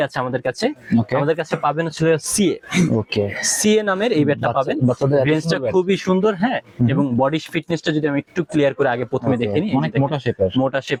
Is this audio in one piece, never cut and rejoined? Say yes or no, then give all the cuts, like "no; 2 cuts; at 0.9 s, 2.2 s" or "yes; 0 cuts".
yes; 0 cuts